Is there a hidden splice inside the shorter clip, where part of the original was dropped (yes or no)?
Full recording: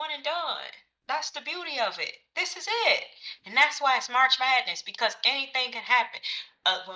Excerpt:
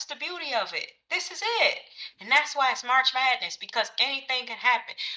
no